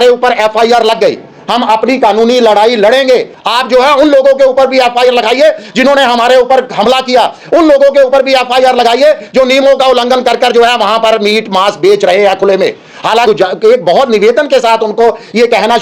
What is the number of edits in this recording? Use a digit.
2